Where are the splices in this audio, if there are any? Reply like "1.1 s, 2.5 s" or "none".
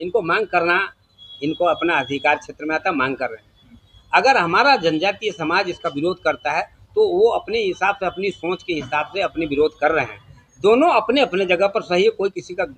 none